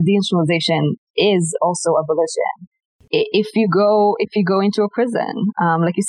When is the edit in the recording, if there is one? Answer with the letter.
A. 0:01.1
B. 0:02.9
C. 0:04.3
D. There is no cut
B